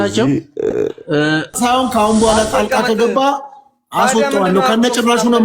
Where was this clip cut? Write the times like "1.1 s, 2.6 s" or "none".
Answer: 1.5 s